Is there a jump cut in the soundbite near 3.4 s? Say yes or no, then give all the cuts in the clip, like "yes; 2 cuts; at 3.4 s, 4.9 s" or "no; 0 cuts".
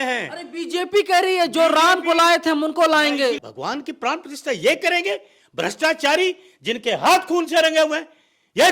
yes; 1 cut; at 3.4 s